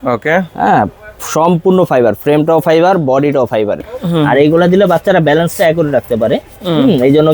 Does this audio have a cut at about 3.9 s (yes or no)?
yes